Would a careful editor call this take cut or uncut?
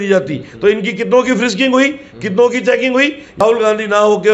cut